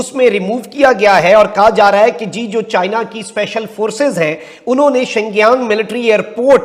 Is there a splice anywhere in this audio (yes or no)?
no